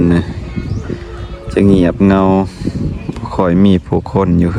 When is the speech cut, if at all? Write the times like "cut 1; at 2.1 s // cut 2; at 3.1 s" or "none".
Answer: none